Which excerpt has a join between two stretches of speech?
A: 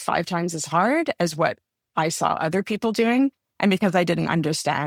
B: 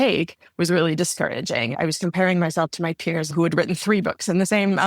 B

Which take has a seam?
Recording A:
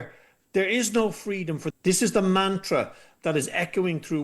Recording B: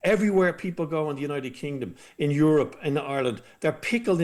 A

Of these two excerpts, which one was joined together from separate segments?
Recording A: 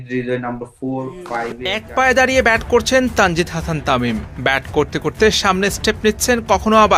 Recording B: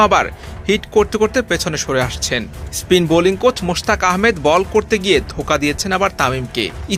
A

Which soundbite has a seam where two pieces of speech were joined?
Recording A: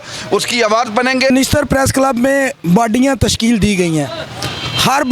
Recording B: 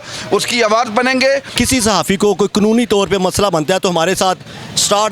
B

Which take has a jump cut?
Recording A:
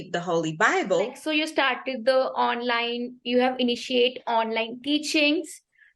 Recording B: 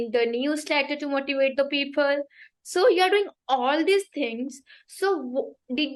A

